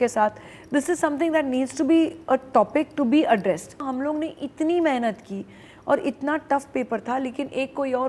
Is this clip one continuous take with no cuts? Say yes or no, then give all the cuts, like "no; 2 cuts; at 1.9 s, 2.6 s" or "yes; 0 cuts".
no; 1 cut; at 3.9 s